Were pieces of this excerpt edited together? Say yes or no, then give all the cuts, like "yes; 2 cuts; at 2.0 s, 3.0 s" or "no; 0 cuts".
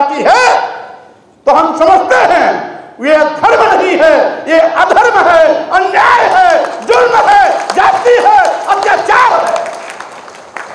no; 0 cuts